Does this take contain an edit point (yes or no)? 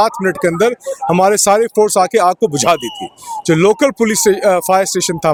no